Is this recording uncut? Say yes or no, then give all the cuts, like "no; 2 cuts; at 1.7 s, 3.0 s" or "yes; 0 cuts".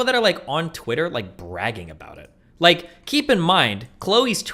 yes; 0 cuts